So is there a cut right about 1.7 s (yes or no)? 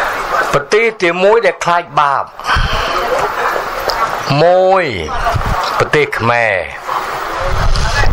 no